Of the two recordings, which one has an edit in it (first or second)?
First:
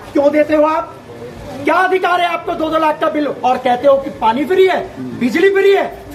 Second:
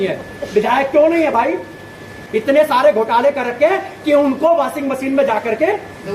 second